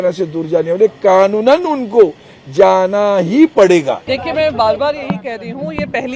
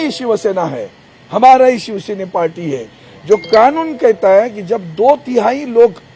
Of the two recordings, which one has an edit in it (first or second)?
first